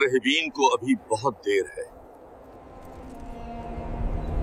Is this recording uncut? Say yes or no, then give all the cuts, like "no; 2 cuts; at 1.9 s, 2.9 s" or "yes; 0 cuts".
yes; 0 cuts